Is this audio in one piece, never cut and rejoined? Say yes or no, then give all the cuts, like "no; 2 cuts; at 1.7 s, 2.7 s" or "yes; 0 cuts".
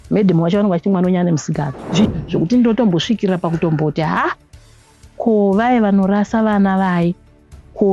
no; 1 cut; at 2.1 s